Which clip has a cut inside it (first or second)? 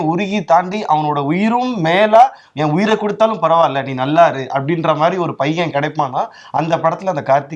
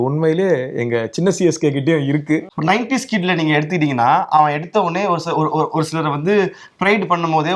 second